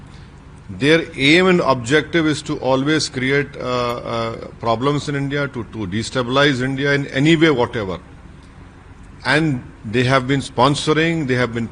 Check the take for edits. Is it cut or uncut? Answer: uncut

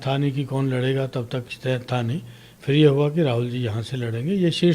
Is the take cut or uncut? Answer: uncut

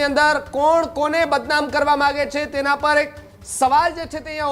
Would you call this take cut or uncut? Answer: uncut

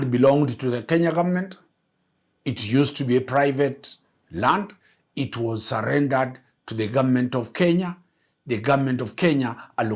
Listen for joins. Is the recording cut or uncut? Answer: uncut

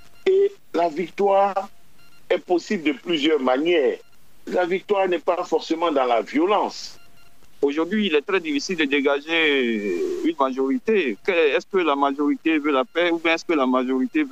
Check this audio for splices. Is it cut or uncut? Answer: cut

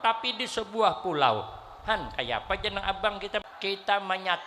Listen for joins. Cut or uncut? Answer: cut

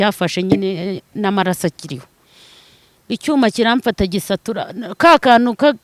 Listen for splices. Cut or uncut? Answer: uncut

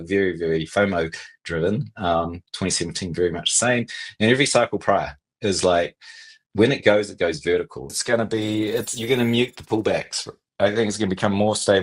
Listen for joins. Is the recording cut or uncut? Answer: cut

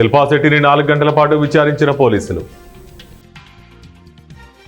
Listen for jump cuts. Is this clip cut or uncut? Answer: cut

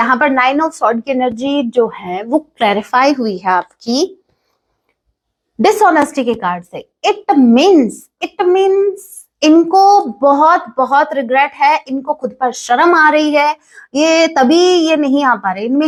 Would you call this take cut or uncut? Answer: uncut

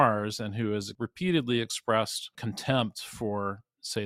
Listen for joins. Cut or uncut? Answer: cut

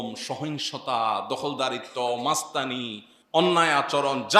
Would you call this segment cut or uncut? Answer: uncut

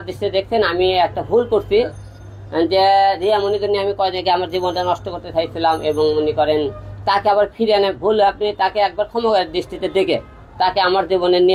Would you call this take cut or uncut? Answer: uncut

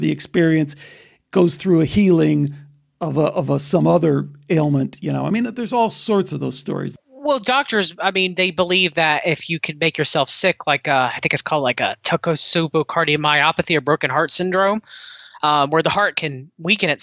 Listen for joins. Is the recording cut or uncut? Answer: cut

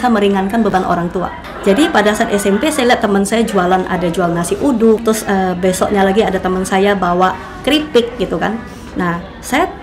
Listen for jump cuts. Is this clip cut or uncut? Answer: cut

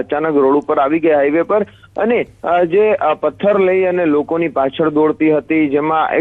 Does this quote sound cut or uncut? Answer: uncut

